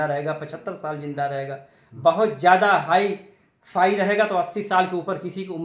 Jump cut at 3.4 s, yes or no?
no